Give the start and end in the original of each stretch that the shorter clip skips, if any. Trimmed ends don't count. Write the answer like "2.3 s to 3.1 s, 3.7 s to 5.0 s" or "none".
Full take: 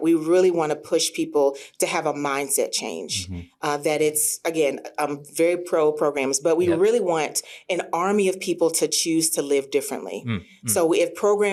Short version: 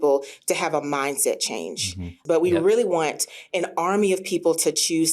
3.5 s to 6.4 s